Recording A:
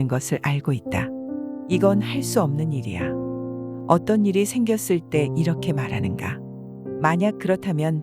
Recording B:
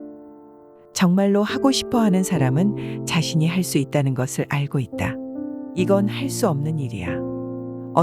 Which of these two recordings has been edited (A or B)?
B